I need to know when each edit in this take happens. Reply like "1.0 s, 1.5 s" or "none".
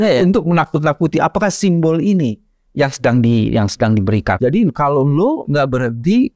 4.4 s